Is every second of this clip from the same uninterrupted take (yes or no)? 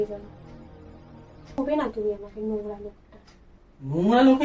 no